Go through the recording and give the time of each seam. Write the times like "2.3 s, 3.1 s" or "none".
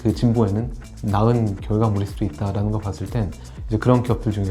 3.4 s